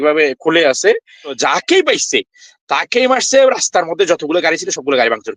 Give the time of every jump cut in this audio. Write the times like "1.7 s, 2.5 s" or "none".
1.4 s